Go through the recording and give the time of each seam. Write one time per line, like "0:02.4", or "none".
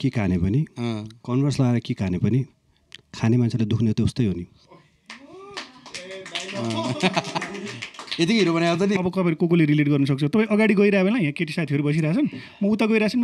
0:09.0